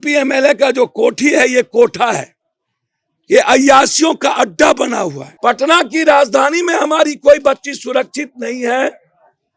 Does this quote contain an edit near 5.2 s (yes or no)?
yes